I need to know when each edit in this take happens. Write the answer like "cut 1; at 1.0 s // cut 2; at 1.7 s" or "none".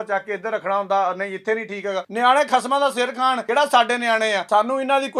cut 1; at 2.1 s // cut 2; at 3.4 s // cut 3; at 4.4 s

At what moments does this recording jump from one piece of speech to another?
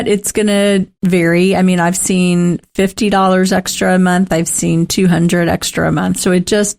cut 1; at 0.9 s

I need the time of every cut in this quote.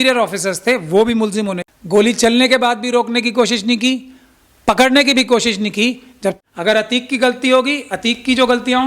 cut 1; at 1.7 s // cut 2; at 6.4 s

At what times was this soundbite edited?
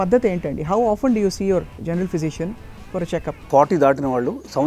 cut 1; at 3.4 s

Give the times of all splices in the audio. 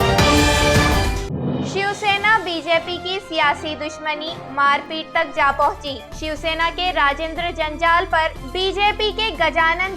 cut 1; at 1.6 s

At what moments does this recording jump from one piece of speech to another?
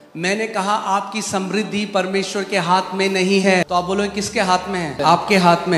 cut 1; at 3.6 s // cut 2; at 4.9 s

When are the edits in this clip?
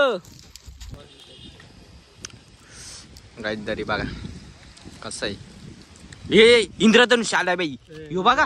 cut 1; at 1.0 s

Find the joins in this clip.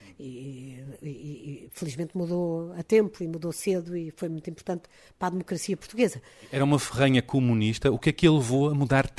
cut 1; at 6.5 s

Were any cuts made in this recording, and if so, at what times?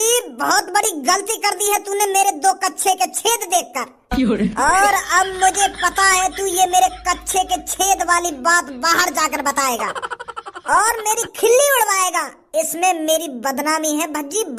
none

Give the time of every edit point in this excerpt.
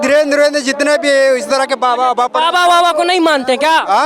none

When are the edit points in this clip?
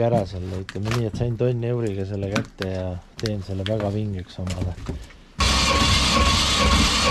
cut 1; at 5.4 s

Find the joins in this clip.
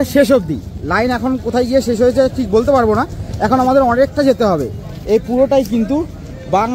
none

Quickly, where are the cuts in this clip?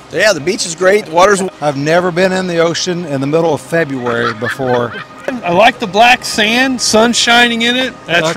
cut 1; at 1.4 s // cut 2; at 5.4 s

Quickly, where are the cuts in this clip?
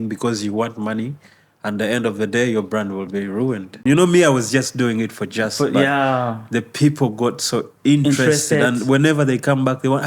cut 1; at 3.8 s

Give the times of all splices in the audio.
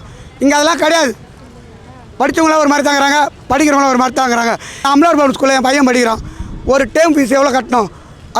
cut 1; at 4.8 s

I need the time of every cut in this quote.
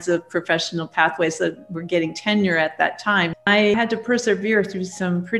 cut 1; at 3.5 s

